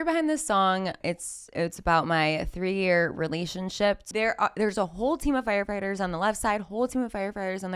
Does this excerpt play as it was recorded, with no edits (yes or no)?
no